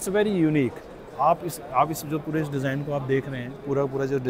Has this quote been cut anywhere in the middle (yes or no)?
no